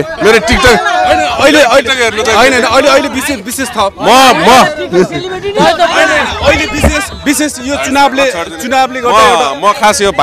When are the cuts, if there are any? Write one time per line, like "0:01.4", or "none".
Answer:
none